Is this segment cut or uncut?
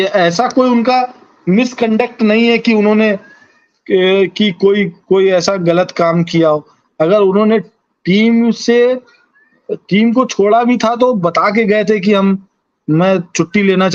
uncut